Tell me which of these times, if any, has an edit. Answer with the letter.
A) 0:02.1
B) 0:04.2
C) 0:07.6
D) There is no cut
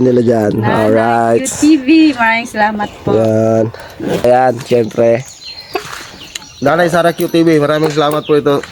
B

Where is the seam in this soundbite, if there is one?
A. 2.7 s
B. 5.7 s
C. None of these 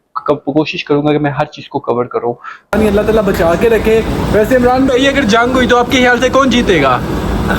A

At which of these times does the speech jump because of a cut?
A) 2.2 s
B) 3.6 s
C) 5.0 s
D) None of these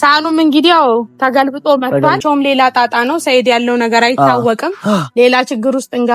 A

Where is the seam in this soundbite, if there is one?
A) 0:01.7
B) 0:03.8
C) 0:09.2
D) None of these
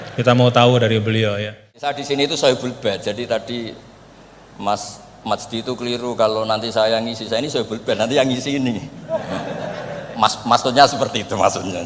A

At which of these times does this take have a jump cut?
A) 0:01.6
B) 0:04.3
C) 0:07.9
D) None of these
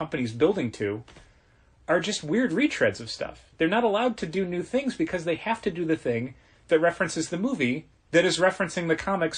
C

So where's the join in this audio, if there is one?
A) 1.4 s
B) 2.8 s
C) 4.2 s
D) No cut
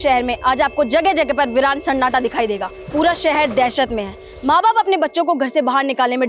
B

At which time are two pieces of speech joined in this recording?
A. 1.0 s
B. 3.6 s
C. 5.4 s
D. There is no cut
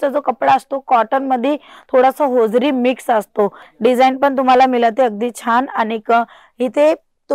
B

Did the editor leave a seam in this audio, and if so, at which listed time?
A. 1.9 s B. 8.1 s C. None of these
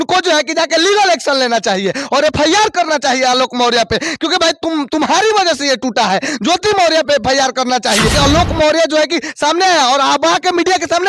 B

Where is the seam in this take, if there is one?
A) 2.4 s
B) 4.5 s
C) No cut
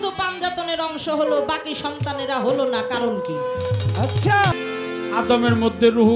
B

